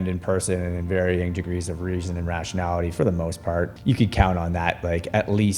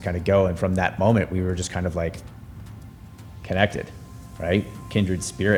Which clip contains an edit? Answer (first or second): first